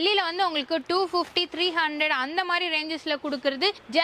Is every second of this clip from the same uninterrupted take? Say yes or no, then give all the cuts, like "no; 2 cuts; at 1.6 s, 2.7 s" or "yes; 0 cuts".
yes; 0 cuts